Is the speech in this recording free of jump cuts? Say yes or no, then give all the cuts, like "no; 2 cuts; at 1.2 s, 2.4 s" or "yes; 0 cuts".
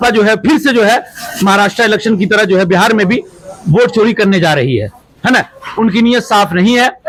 yes; 0 cuts